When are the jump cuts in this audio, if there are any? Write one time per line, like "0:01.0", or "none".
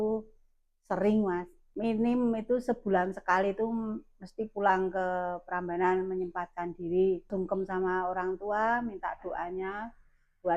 0:01.6
0:07.3